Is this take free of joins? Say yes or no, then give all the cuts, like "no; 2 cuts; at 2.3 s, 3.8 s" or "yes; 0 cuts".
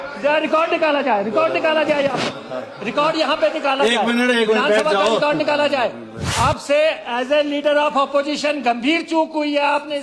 no; 1 cut; at 6.2 s